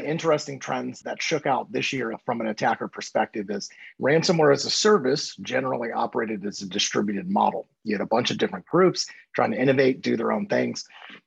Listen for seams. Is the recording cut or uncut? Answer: cut